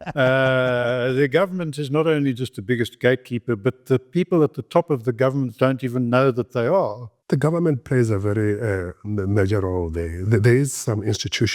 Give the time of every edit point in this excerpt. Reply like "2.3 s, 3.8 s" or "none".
7.2 s